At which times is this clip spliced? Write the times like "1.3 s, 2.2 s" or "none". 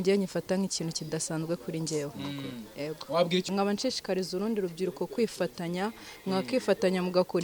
3.5 s